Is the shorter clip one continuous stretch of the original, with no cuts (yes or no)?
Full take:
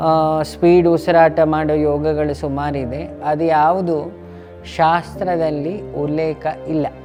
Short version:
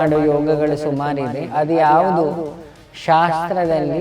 no